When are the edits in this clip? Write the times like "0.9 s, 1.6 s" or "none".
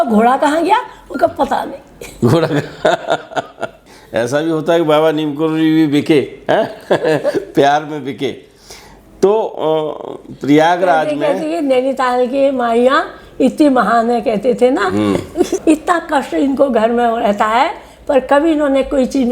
4.0 s